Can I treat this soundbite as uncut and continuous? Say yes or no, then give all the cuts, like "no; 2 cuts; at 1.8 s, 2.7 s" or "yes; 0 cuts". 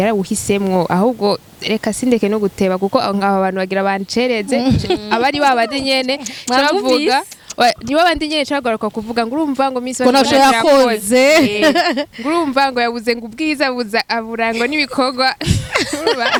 yes; 0 cuts